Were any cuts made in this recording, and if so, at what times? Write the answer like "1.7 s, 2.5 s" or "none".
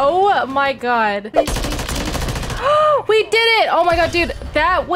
1.3 s